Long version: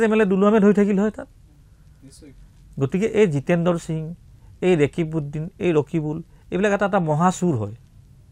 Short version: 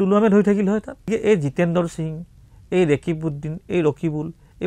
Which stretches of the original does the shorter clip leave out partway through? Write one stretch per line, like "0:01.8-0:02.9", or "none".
0:01.4-0:03.0